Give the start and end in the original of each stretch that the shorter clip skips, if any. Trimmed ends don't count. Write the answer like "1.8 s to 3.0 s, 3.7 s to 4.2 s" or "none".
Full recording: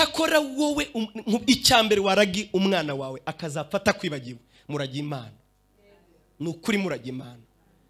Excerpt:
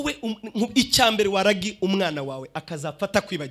none